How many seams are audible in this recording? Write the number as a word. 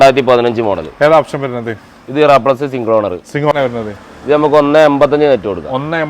one